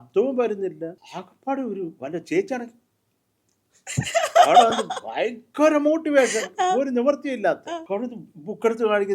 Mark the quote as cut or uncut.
cut